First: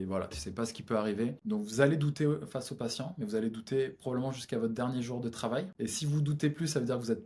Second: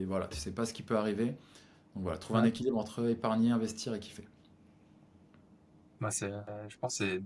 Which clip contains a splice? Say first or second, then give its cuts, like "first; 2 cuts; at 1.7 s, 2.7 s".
first; 2 cuts; at 1.4 s, 5.7 s